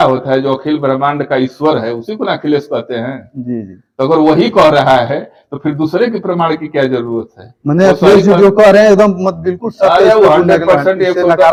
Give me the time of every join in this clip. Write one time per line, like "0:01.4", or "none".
none